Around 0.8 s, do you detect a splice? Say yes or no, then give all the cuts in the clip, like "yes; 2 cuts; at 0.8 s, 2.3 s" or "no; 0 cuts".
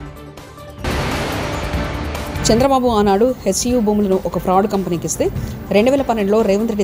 yes; 2 cuts; at 0.8 s, 2.4 s